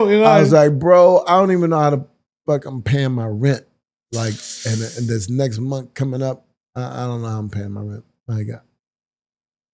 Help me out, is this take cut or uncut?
uncut